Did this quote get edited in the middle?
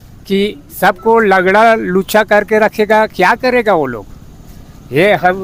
no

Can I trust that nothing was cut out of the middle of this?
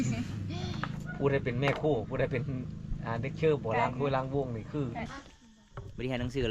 no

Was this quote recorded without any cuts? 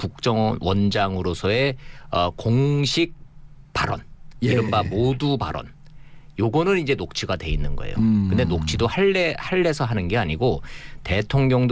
yes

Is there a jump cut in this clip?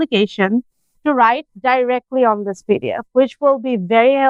no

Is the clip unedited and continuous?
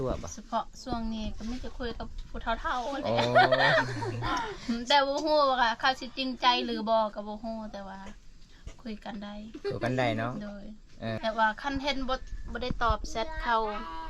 no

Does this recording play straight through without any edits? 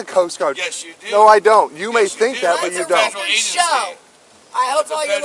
yes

